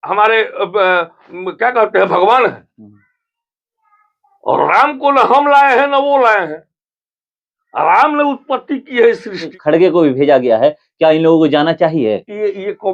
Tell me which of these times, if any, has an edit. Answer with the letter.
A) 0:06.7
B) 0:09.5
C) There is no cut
B